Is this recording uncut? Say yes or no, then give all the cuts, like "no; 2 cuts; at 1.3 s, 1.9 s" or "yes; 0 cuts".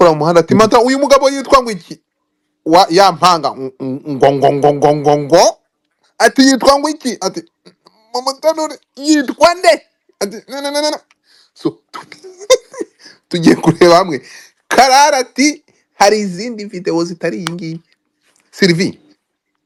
yes; 0 cuts